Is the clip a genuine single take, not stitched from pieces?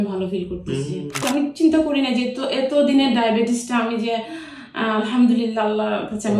no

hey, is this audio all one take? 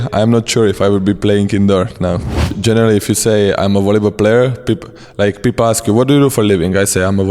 no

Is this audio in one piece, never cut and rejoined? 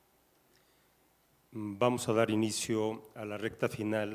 yes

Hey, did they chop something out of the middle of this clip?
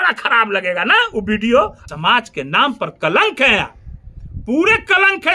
yes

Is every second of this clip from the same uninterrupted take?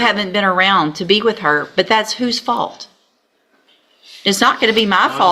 yes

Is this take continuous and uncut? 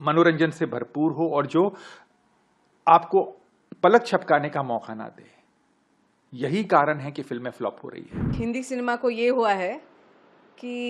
no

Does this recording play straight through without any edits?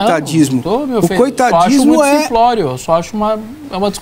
yes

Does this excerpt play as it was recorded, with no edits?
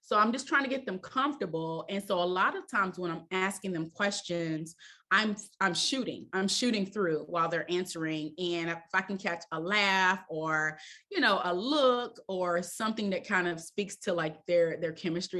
yes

